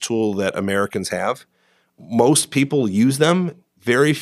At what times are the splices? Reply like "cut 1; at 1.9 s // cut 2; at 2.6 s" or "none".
none